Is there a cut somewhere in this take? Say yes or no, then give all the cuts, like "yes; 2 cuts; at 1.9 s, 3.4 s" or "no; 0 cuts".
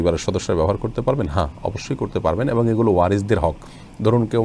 no; 0 cuts